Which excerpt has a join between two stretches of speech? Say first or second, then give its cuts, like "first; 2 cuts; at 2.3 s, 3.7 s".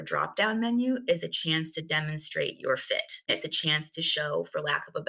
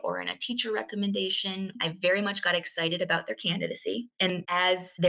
second; 1 cut; at 4.1 s